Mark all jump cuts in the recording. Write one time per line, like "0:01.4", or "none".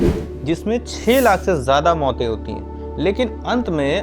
none